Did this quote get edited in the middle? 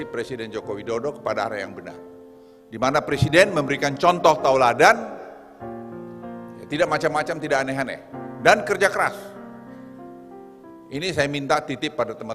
yes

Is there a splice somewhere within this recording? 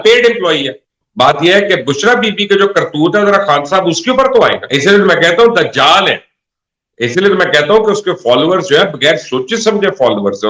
yes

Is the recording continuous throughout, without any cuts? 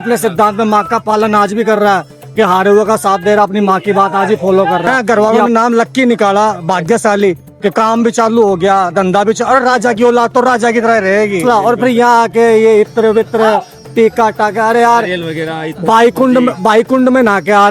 no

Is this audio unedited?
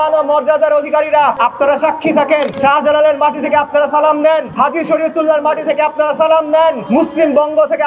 no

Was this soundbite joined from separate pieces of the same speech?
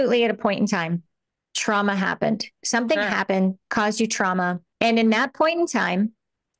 yes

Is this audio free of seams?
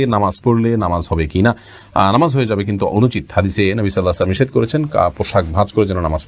yes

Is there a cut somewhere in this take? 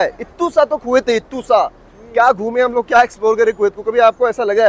no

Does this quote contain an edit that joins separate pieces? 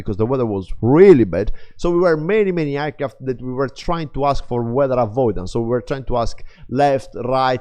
no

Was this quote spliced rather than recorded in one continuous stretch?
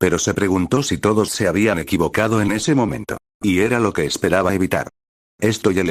no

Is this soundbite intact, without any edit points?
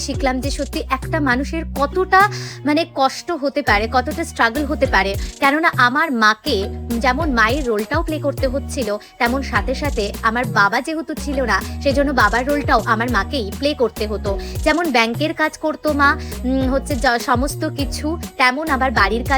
yes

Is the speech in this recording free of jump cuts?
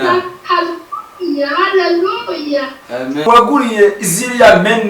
no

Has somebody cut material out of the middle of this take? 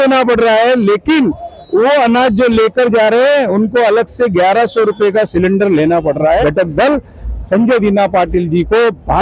yes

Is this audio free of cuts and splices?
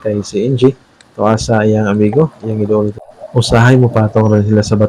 no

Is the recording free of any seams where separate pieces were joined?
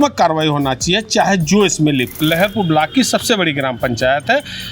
no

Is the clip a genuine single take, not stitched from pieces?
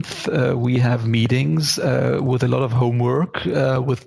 yes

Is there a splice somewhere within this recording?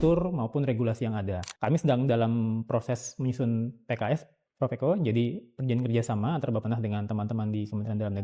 yes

